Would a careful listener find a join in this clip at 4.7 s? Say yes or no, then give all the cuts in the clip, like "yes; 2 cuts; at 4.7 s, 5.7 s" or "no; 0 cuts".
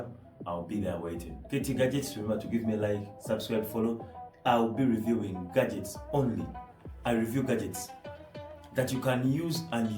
no; 1 cut; at 1.3 s